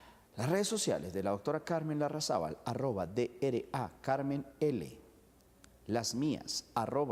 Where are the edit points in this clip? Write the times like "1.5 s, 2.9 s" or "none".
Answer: none